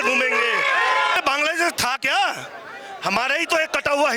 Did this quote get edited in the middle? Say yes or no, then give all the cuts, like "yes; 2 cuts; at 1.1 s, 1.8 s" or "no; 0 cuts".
yes; 1 cut; at 1.2 s